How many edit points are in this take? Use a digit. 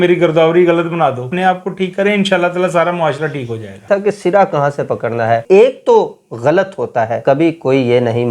4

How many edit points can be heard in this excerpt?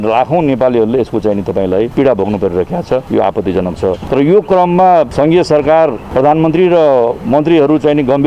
5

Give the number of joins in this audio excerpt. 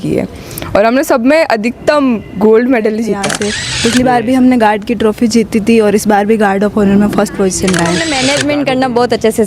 2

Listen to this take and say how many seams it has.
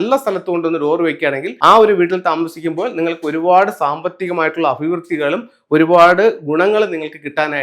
1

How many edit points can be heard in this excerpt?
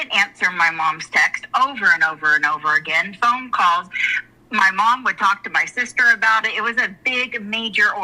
0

